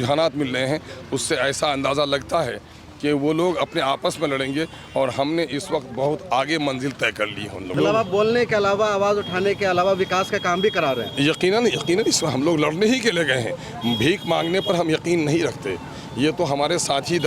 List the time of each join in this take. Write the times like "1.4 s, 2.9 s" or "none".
7.7 s